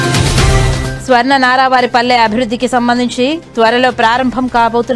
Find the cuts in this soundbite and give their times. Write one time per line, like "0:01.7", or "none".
none